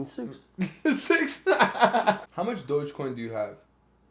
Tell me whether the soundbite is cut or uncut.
cut